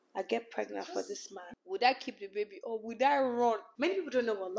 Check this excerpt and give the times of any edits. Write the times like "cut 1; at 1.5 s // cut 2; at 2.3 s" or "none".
cut 1; at 1.5 s // cut 2; at 3.7 s